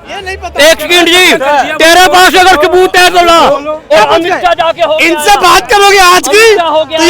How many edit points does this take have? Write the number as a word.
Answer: one